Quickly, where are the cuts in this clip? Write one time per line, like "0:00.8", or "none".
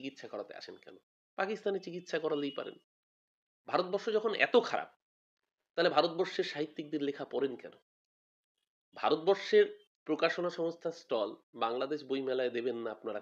none